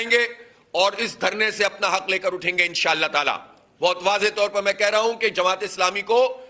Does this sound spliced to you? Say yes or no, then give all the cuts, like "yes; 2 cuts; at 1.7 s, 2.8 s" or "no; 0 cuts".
no; 0 cuts